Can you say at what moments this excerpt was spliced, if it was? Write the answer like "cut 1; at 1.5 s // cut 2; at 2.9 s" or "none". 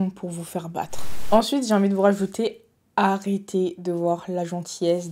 cut 1; at 1.1 s